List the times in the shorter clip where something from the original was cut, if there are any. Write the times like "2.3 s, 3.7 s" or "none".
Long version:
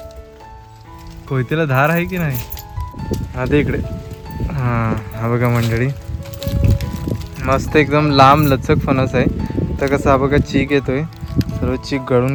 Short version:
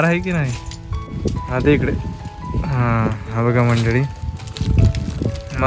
none